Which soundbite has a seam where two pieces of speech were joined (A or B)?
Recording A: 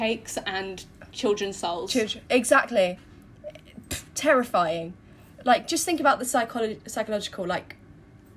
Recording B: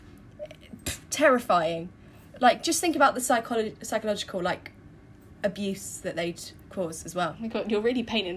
B